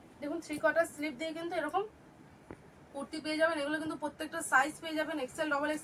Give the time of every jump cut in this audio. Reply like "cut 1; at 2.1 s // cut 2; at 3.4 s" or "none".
none

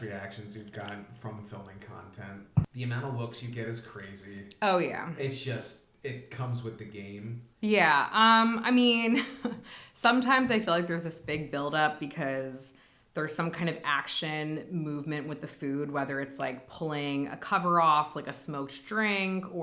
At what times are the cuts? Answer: cut 1; at 2.7 s // cut 2; at 7.4 s

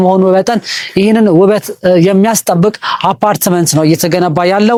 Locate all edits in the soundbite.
none

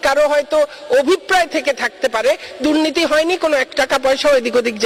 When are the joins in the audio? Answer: none

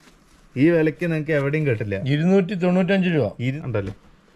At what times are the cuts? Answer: cut 1; at 3.5 s

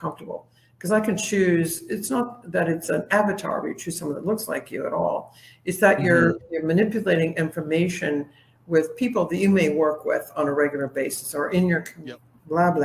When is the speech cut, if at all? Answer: cut 1; at 11.9 s

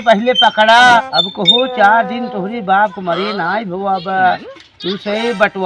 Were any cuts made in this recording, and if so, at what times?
cut 1; at 1.0 s

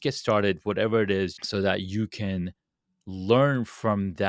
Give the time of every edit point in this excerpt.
cut 1; at 1.4 s

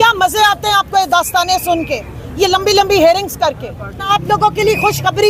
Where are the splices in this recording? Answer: cut 1; at 4.1 s

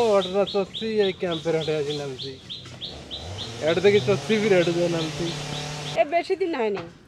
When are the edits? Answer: cut 1; at 5.8 s

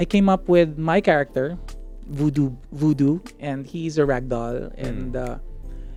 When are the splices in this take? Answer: none

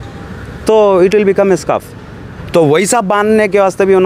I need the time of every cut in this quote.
none

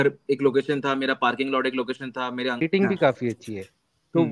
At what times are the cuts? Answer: cut 1; at 2.6 s

